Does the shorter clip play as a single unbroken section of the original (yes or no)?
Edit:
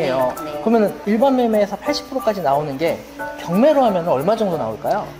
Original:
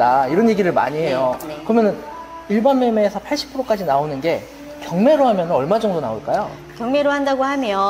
no